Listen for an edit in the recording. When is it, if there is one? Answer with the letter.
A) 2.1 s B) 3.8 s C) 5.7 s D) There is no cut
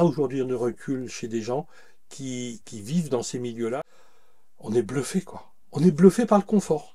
B